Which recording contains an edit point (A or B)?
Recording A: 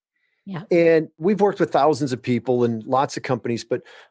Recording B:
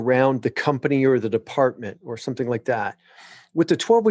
A